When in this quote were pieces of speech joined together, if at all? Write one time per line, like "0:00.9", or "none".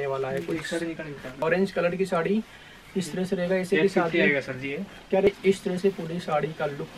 0:01.3
0:05.3